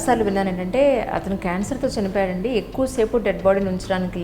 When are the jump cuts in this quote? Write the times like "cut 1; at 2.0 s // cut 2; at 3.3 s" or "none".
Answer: none